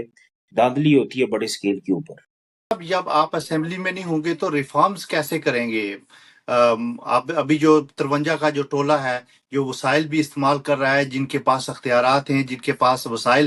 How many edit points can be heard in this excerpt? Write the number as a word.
one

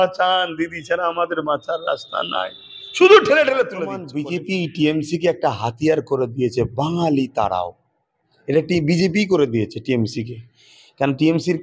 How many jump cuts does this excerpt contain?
one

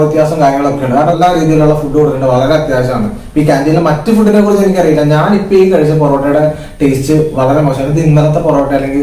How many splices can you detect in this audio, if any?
one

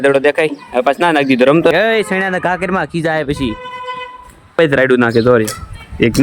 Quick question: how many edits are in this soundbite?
two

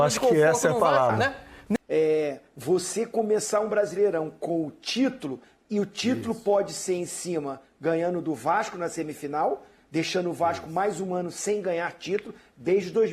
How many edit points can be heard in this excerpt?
one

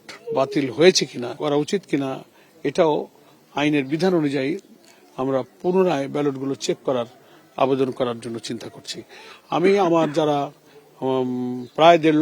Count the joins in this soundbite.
one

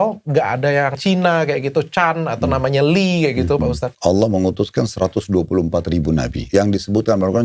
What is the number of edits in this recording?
three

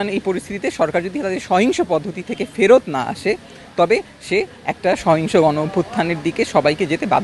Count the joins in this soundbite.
zero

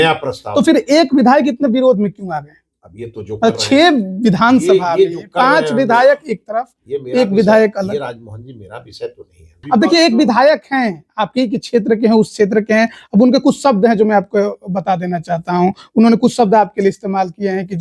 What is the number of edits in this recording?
one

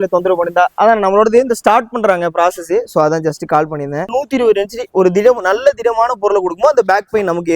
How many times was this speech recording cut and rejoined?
one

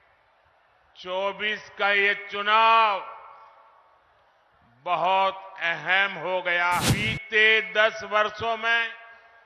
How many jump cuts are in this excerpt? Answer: one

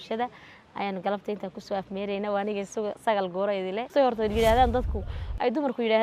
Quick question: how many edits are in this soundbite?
one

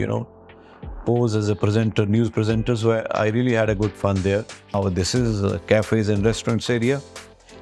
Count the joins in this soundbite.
one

